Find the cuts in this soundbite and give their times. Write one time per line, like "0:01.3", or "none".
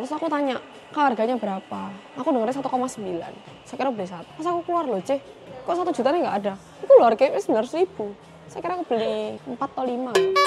0:04.2
0:09.4

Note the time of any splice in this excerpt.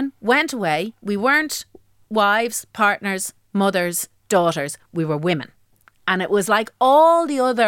0:01.0

